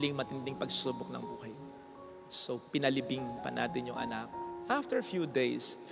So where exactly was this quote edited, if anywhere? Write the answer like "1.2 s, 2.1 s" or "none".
none